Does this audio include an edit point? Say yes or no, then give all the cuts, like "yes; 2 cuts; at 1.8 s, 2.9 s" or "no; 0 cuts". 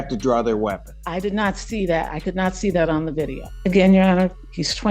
yes; 2 cuts; at 0.9 s, 3.4 s